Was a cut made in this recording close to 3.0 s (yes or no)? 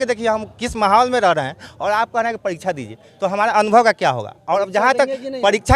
no